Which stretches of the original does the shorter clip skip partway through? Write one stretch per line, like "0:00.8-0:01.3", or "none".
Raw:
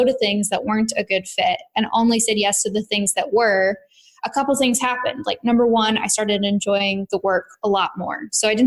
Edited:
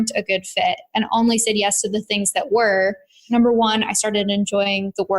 0:04.0-0:05.3

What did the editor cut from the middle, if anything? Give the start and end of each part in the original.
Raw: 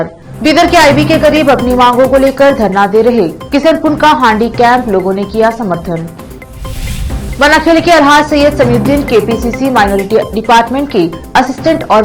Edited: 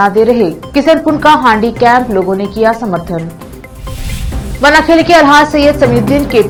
none

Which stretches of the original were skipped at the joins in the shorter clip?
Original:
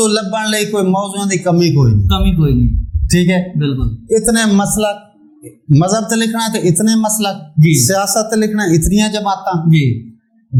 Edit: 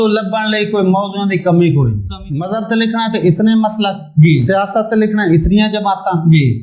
0:02.0-0:05.4

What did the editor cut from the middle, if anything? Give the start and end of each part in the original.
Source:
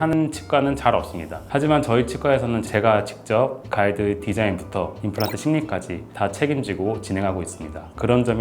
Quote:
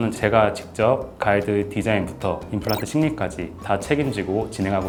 none

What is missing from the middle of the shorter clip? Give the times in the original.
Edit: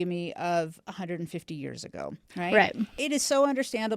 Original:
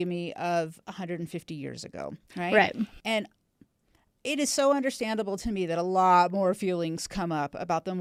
0:02.9-0:04.2

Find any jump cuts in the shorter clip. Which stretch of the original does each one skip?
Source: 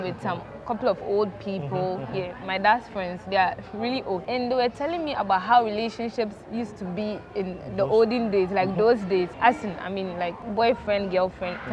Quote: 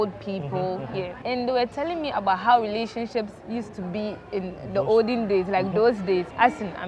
0:02.4-0:04.2

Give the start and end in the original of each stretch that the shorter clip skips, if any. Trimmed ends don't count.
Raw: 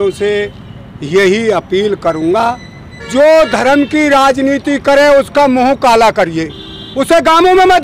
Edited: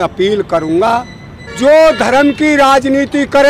none

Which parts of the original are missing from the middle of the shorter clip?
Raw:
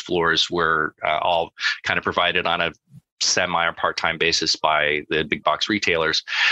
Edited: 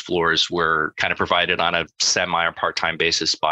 0:00.9-0:01.8
0:02.8-0:03.2

